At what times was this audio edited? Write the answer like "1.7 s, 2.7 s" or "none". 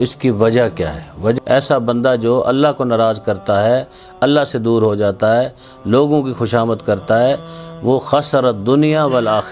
1.3 s